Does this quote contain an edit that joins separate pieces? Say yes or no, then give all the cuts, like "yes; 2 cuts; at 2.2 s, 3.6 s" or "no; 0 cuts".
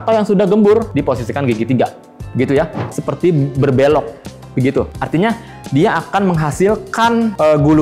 yes; 1 cut; at 2.8 s